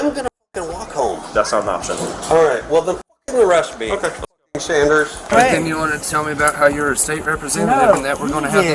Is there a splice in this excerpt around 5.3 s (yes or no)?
yes